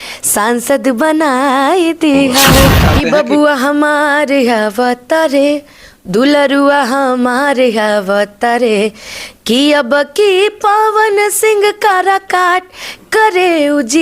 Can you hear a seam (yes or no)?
yes